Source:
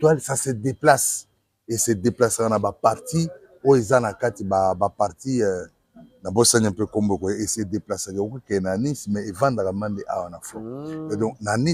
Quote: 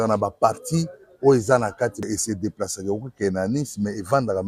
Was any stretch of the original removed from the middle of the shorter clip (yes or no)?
yes